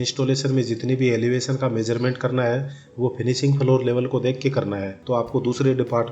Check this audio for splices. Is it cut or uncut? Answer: cut